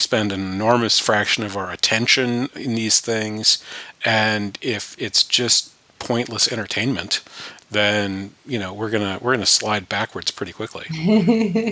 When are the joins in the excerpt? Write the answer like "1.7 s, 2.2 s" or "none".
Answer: none